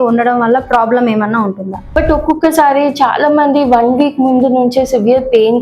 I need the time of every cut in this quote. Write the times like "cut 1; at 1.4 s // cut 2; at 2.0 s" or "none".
cut 1; at 1.8 s